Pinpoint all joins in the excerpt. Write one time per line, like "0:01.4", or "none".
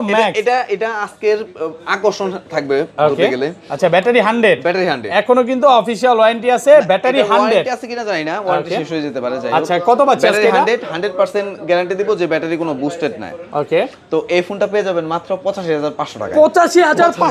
none